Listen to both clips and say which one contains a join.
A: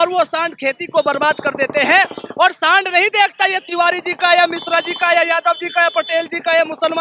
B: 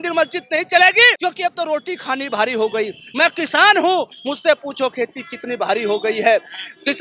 B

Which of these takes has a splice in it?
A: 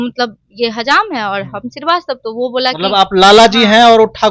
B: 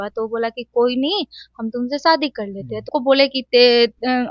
B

